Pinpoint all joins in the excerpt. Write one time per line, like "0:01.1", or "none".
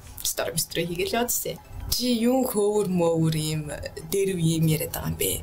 0:01.6